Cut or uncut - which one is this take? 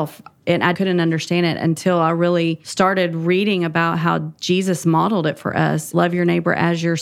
cut